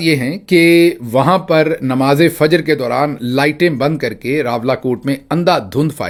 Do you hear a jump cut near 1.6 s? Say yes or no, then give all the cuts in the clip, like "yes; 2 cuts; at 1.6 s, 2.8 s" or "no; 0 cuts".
no; 0 cuts